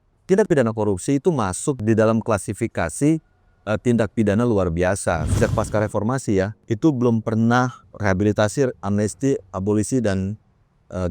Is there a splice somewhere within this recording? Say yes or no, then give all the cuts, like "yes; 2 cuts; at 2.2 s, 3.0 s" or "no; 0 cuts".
yes; 4 cuts; at 1.8 s, 5.3 s, 6.6 s, 7.9 s